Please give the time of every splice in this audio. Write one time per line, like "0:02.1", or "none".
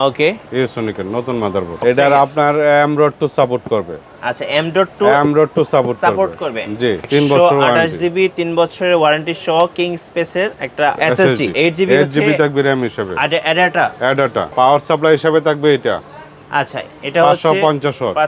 0:01.7
0:07.0
0:11.5
0:14.5